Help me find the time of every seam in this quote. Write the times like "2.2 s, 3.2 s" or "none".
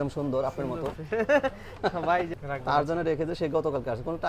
2.3 s